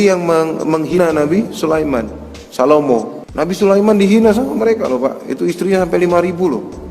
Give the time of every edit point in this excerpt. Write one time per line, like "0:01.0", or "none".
0:00.9
0:03.2